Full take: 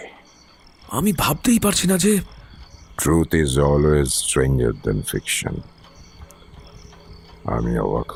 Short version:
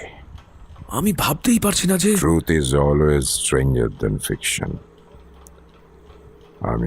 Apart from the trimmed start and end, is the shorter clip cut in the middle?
yes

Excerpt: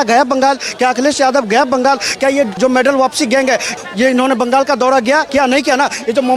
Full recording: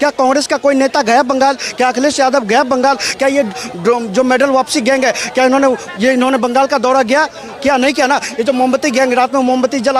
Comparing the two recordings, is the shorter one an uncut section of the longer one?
no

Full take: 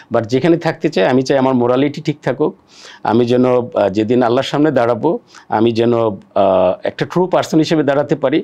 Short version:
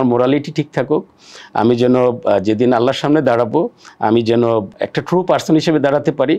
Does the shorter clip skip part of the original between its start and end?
yes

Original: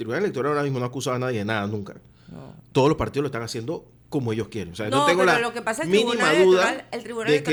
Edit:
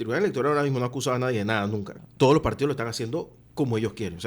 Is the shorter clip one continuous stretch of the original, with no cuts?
no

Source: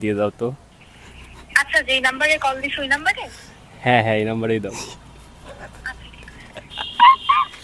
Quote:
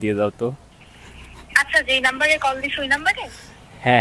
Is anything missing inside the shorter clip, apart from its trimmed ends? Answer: no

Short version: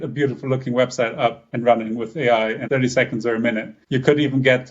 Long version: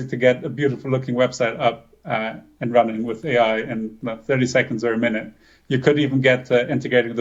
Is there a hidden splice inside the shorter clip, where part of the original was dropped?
yes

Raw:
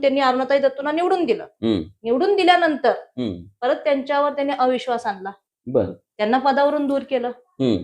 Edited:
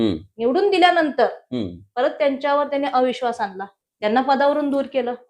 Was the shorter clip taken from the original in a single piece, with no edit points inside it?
no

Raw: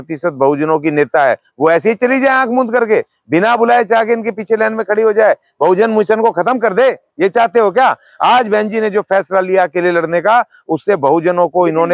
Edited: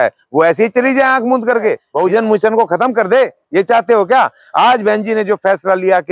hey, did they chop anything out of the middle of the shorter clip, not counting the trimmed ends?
yes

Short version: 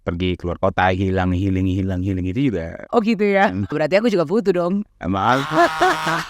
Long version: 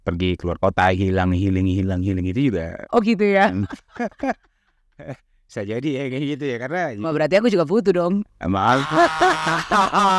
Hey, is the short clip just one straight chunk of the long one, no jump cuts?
no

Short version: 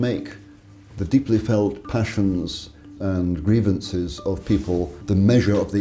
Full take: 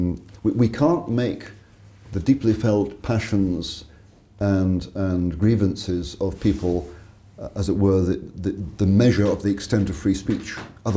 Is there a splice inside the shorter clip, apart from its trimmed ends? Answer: yes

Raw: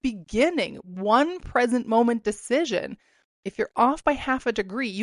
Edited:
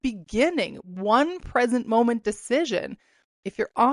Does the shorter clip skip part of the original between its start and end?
no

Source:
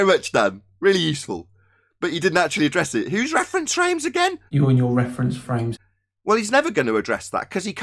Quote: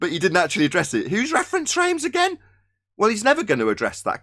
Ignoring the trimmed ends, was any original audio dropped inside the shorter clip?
yes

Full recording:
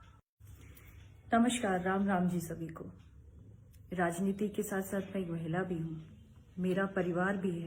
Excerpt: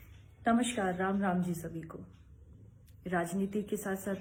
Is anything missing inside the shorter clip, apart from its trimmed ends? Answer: no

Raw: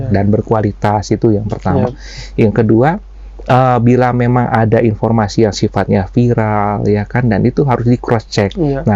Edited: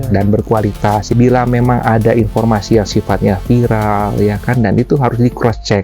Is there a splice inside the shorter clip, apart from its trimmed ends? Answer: yes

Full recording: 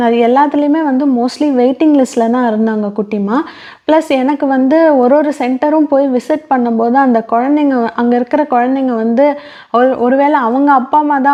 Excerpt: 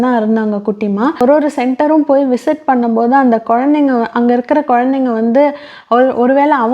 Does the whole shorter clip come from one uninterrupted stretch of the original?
no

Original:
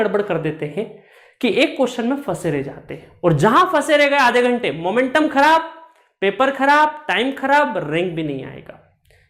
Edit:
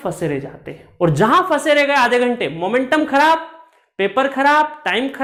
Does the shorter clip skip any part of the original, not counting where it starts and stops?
no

